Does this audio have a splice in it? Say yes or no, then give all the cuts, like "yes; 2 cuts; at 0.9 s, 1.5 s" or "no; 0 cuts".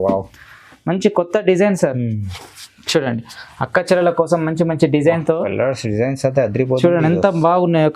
no; 0 cuts